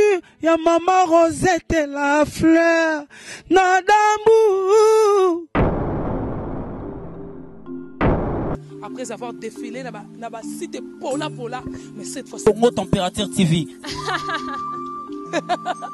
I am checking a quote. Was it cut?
no; 0 cuts

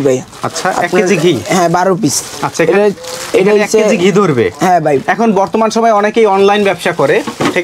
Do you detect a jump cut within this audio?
no; 0 cuts

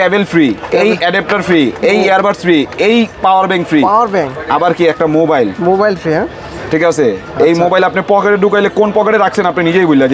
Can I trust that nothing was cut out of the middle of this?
yes; 0 cuts

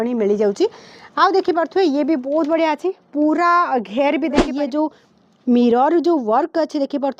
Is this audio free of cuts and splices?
no; 1 cut; at 4.5 s

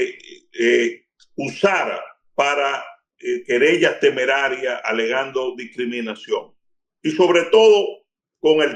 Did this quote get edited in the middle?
no; 0 cuts

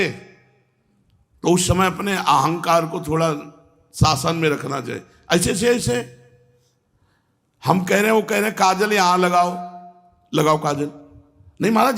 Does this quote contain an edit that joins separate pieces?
no; 0 cuts

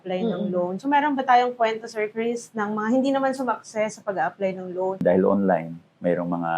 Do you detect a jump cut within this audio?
yes; 1 cut; at 5.0 s

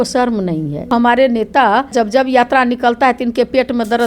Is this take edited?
yes; 2 cuts; at 0.9 s, 1.9 s

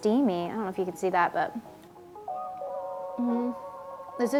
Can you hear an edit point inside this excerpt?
no; 0 cuts

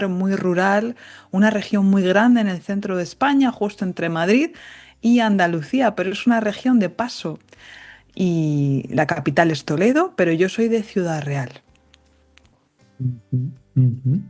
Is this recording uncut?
yes; 0 cuts

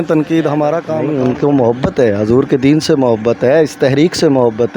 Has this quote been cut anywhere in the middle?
yes; 1 cut; at 0.9 s

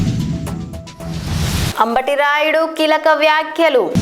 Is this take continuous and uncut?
no; 1 cut; at 1.7 s

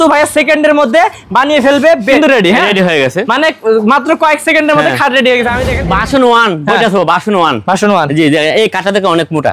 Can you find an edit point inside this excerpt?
yes; 2 cuts; at 2.2 s, 5.7 s

